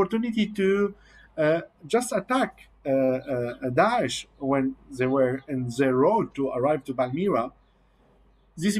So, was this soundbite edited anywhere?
no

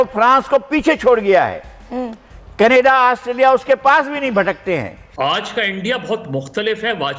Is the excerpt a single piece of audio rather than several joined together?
no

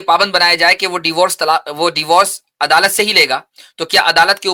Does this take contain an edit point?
no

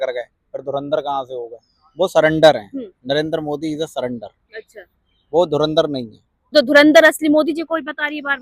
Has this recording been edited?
yes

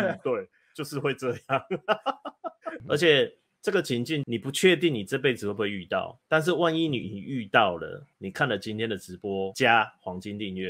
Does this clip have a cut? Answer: yes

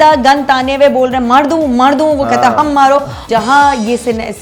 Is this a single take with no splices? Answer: no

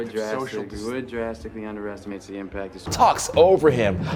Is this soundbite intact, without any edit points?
no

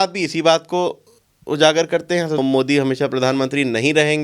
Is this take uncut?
no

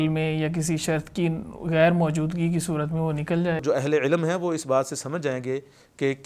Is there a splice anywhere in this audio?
yes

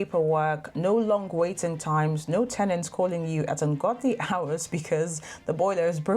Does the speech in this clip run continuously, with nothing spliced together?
yes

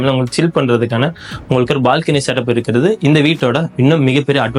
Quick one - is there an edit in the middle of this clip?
no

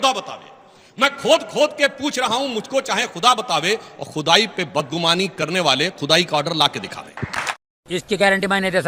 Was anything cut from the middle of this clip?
no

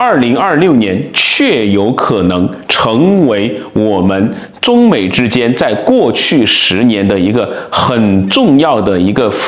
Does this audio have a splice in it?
no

